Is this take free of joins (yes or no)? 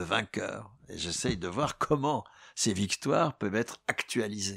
yes